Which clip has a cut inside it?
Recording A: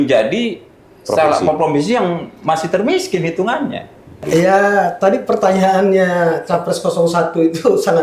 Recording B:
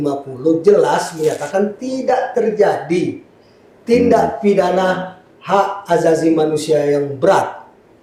A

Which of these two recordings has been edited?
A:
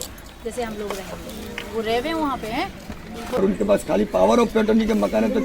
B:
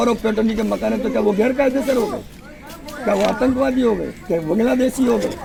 A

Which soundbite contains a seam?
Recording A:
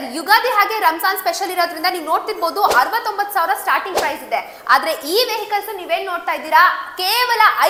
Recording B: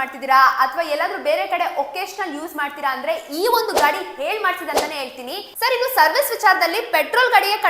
B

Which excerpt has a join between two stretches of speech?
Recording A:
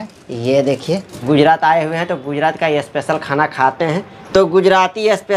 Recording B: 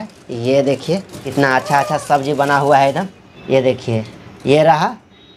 A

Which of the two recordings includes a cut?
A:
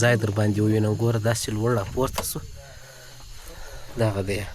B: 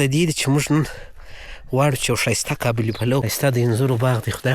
B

